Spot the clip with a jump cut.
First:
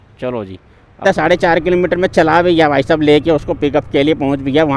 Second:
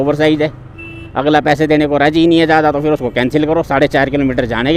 first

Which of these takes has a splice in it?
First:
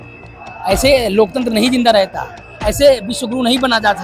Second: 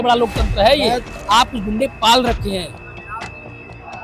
second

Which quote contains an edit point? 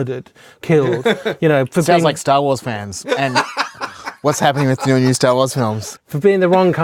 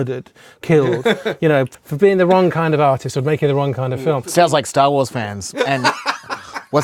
second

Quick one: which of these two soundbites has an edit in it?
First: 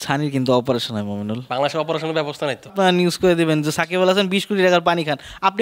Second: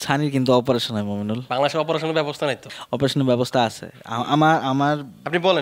first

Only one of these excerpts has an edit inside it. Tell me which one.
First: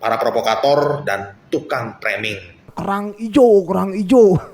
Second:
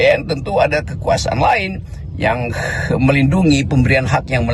first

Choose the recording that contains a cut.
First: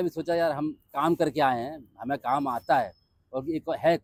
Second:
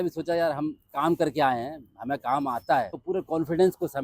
second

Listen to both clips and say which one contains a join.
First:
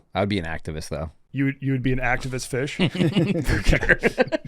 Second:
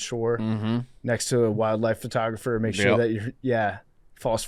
first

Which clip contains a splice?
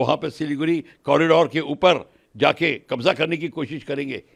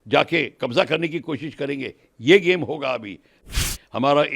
second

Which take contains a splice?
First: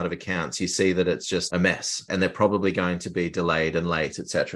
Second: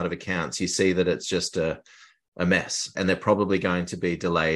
first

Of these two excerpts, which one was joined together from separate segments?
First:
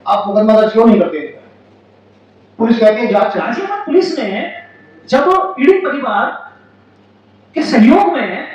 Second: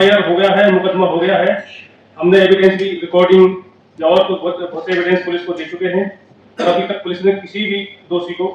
first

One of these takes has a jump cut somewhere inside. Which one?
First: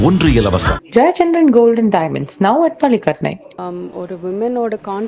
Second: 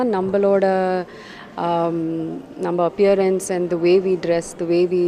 first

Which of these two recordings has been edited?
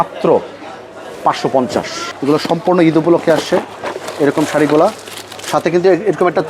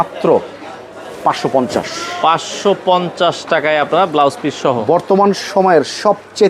first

